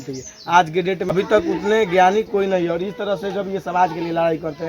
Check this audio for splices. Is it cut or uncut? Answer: cut